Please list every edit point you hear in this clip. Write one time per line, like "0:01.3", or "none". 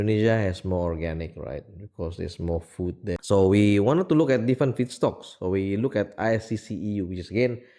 0:03.2